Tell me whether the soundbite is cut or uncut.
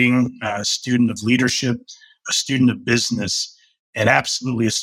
uncut